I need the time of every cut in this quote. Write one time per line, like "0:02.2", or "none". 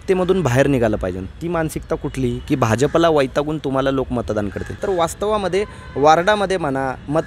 0:04.8